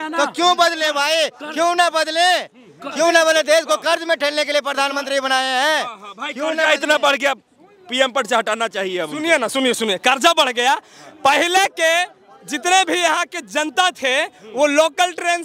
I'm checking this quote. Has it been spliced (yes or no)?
no